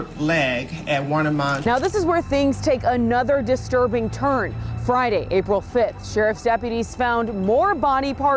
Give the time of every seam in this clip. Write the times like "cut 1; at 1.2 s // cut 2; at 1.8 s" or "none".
cut 1; at 1.6 s